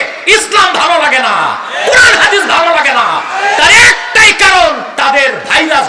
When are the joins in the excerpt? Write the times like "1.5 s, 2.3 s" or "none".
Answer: none